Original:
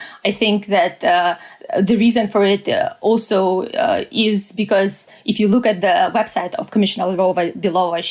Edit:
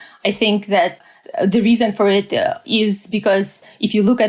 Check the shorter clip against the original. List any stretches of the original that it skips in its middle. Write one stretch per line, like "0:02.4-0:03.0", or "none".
0:01.0-0:01.3
0:03.0-0:04.1

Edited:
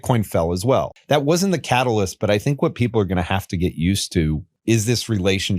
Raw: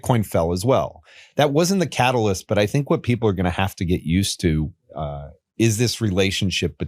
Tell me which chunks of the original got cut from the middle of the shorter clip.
0:00.9-0:01.2
0:04.8-0:05.4

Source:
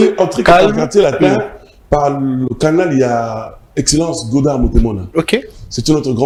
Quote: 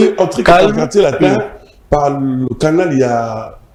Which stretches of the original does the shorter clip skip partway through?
none

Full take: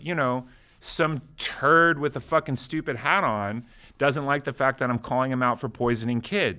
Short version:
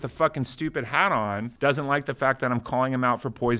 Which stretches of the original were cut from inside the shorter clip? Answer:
0:03.6-0:03.9

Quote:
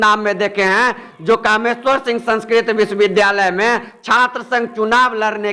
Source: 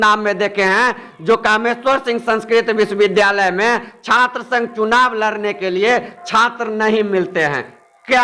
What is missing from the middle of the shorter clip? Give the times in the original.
none

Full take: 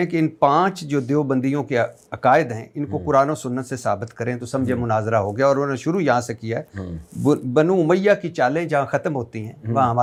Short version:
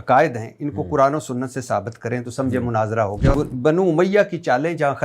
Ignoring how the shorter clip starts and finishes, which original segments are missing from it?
0:05.5-0:07.2

